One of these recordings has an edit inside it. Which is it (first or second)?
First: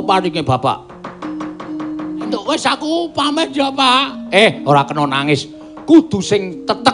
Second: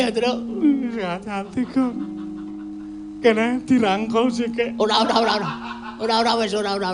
first